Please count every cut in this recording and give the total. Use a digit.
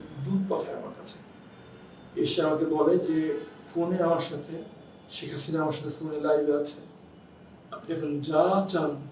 0